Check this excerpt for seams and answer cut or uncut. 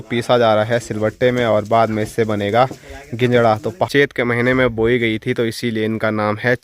cut